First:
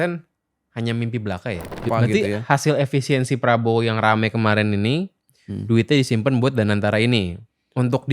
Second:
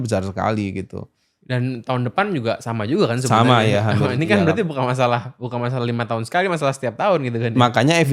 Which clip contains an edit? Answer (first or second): first